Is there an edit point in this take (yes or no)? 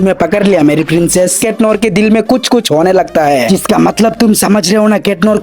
yes